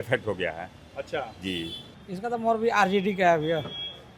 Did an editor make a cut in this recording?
yes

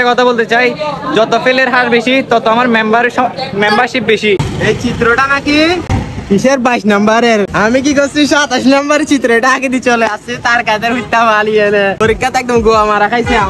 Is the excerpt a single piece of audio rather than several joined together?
no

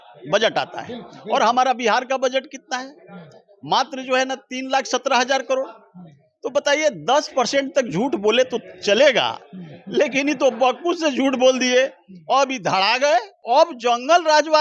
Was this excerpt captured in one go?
no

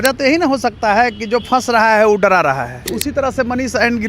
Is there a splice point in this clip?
yes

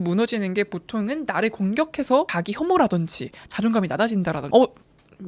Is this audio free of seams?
no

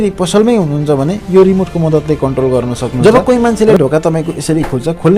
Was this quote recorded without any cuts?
no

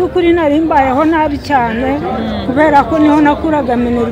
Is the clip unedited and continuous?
yes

